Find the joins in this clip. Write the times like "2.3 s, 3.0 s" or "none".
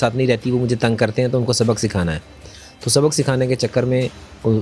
none